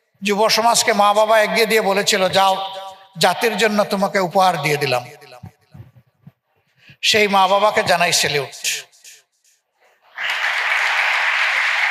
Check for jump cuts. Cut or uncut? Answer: uncut